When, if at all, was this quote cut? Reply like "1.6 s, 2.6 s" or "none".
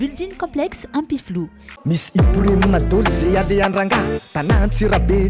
1.7 s